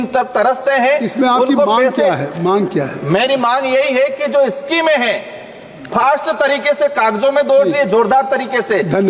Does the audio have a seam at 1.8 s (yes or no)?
no